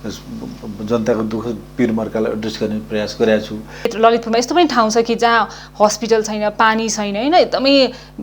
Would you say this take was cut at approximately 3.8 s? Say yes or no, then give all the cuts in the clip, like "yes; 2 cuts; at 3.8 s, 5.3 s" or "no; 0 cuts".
yes; 1 cut; at 3.8 s